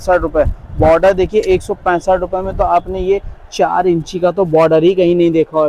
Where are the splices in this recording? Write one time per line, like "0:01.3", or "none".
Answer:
none